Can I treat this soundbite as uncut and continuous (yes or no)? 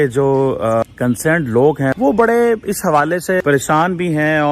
no